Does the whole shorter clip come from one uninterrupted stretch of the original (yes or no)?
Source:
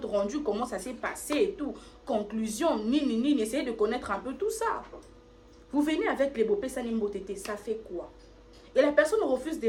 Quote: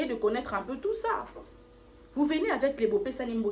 yes